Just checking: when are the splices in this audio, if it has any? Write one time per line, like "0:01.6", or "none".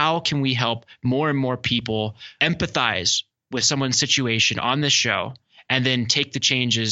0:02.2